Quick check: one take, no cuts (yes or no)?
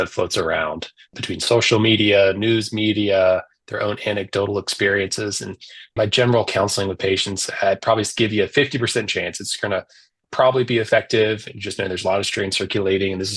yes